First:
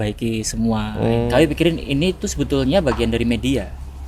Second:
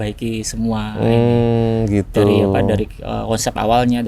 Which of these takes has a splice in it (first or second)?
first